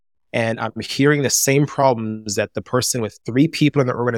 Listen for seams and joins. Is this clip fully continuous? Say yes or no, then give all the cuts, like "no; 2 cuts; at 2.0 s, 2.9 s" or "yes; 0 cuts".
no; 1 cut; at 3.2 s